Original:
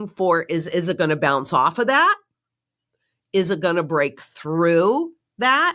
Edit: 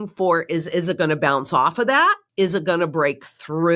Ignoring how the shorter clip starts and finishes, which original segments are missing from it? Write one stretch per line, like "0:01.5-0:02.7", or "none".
0:02.2-0:03.2